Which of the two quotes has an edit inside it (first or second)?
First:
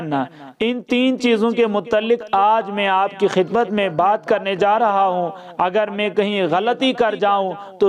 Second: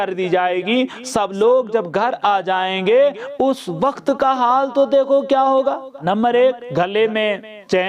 second